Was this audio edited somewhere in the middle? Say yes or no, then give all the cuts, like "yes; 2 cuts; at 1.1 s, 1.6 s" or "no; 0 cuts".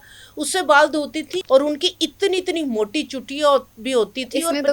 yes; 1 cut; at 1.3 s